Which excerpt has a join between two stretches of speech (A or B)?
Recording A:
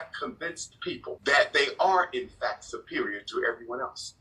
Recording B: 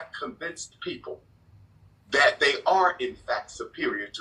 A